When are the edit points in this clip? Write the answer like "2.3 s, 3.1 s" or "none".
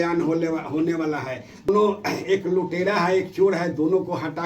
1.7 s